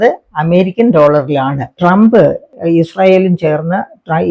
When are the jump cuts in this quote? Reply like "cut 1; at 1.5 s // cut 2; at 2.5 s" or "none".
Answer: cut 1; at 1.7 s // cut 2; at 2.5 s